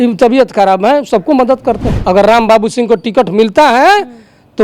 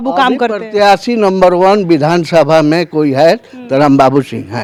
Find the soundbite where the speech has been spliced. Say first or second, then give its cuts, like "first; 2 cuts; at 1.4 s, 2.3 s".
first; 1 cut; at 1.9 s